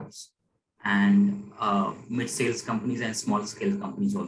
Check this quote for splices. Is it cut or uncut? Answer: uncut